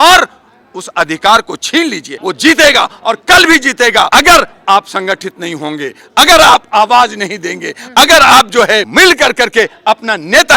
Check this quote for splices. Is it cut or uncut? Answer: cut